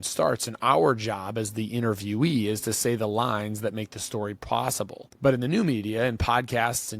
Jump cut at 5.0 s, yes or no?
yes